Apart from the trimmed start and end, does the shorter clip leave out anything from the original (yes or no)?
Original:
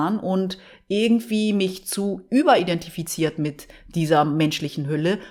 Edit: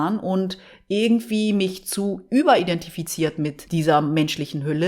yes